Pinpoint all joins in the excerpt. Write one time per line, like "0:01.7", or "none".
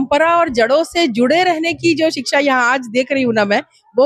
none

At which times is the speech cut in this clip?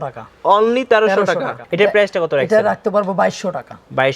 0:01.6

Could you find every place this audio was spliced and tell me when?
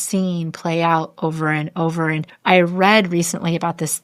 none

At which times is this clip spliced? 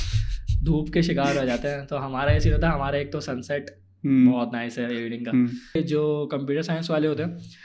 0:05.8

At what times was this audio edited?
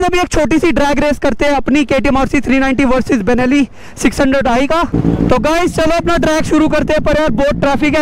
none

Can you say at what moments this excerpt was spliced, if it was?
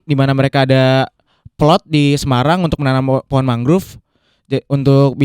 none

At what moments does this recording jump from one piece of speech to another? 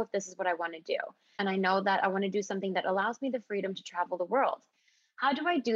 0:01.4

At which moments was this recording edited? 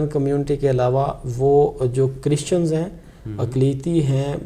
none

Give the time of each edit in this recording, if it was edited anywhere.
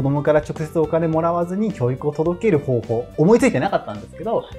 none

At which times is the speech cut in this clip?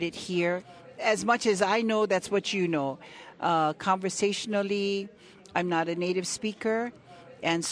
0:01.0

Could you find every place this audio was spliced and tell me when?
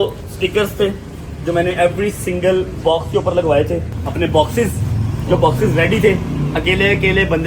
0:04.0

